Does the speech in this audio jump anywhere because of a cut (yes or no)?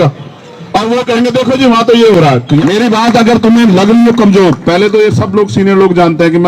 yes